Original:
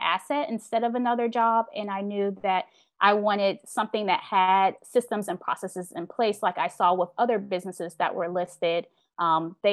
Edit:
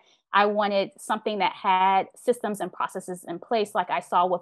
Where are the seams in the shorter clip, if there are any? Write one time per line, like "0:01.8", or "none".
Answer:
none